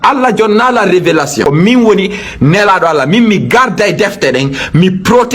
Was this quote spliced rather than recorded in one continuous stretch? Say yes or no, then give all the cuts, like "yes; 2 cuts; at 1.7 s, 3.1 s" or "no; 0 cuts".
yes; 1 cut; at 1.5 s